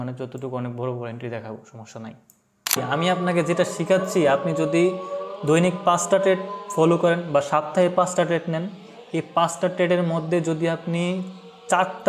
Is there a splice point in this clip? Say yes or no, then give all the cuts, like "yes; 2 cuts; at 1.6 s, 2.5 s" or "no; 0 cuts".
yes; 1 cut; at 2.8 s